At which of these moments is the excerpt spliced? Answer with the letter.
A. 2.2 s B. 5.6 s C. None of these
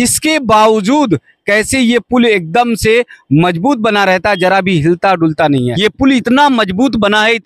B